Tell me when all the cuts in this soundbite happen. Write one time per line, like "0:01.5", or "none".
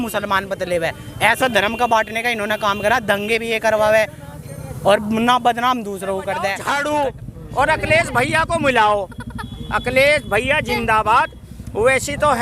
0:06.6